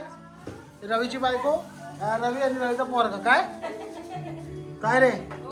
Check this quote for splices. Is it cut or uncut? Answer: uncut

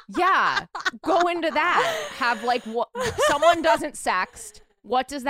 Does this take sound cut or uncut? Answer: uncut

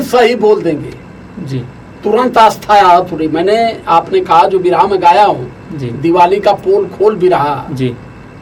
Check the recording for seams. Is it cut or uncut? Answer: uncut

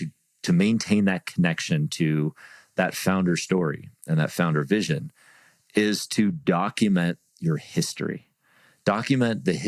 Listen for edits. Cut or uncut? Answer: uncut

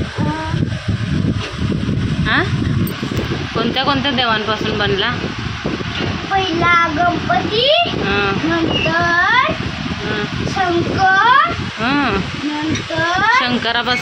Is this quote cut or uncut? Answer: uncut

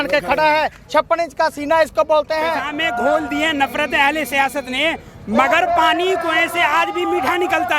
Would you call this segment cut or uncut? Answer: cut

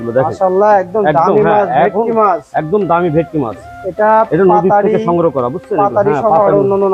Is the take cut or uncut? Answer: uncut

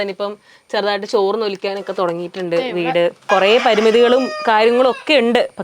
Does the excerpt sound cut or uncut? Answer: cut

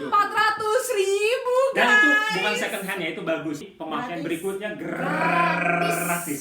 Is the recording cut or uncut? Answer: cut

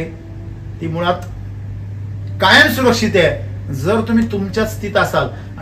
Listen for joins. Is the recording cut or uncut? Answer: uncut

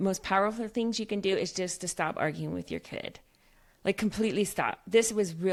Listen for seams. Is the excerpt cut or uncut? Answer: uncut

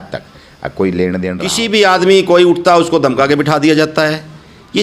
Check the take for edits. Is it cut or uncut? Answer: cut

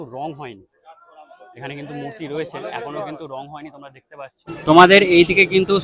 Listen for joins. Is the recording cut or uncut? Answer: cut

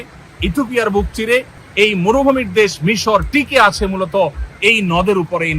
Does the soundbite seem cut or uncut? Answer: cut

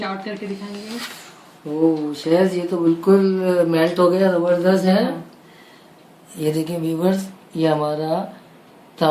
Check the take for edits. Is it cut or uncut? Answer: uncut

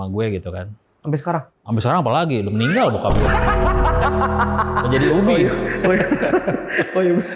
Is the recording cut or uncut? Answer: cut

